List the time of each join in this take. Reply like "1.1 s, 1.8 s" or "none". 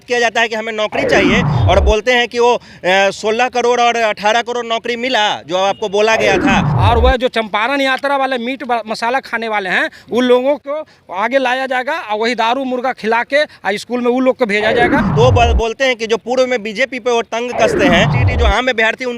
1.5 s, 6.7 s, 15.0 s, 18.2 s